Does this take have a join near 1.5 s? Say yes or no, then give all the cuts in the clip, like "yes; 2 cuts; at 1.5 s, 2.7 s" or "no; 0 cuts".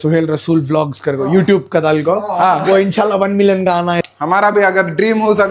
no; 1 cut; at 4.0 s